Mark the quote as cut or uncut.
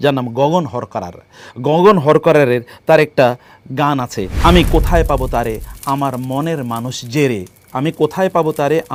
uncut